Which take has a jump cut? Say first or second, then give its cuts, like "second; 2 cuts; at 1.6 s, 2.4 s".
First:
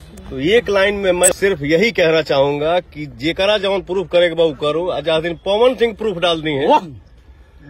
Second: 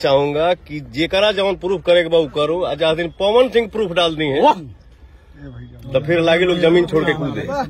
first; 1 cut; at 1.3 s